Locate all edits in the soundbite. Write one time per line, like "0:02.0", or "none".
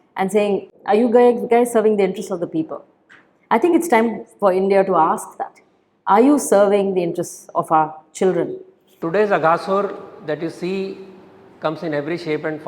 0:09.0

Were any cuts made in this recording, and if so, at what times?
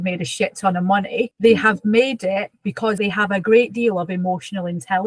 0:01.3
0:03.0

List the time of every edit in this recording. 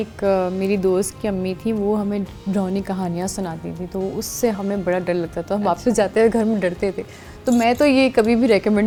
none

